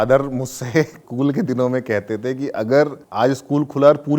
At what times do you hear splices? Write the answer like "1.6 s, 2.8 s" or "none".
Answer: 1.0 s, 3.0 s

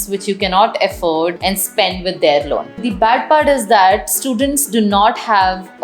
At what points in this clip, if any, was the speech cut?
1.4 s, 2.9 s

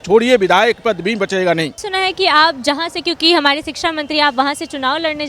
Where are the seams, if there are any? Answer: 1.9 s

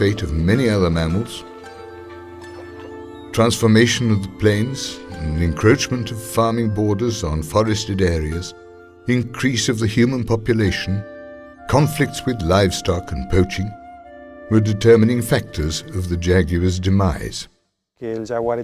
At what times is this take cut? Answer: 3.2 s

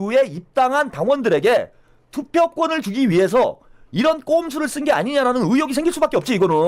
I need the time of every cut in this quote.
none

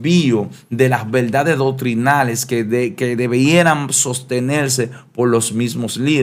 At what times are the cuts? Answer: none

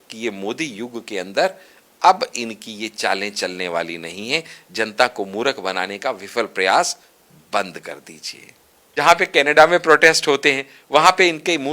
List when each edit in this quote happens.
8.8 s

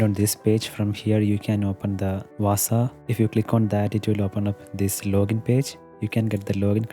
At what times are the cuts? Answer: 2.3 s, 3.0 s

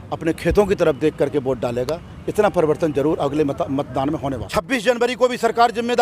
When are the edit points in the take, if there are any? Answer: 4.4 s

